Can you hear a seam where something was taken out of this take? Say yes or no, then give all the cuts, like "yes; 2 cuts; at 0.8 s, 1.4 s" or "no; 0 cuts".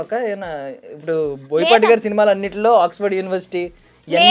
no; 0 cuts